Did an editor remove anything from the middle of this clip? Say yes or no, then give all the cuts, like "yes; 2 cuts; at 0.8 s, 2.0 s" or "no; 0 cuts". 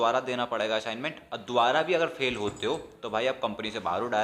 no; 0 cuts